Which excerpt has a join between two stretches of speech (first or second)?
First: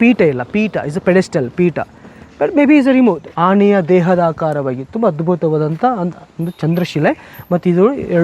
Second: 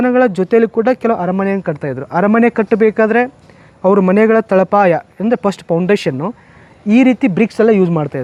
first